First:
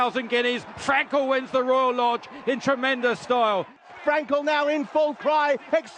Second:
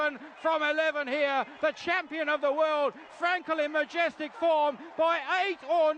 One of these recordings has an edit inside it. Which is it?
first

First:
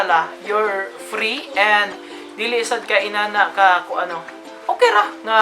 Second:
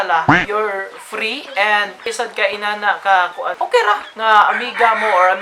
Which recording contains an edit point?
second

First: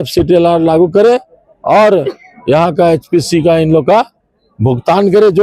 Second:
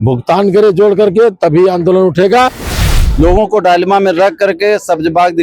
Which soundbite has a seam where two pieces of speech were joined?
second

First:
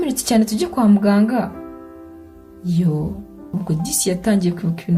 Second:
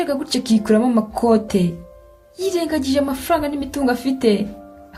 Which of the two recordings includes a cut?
first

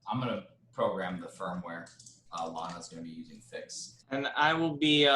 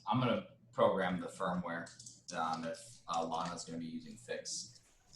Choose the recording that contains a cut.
first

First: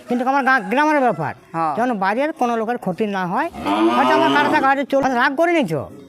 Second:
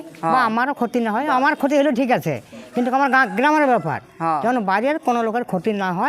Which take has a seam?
first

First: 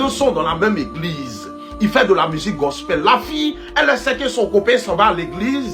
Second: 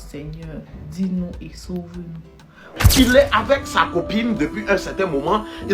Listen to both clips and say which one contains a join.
second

